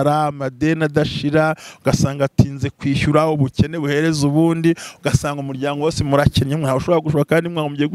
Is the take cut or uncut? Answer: uncut